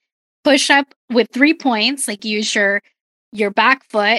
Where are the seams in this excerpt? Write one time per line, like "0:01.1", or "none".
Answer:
none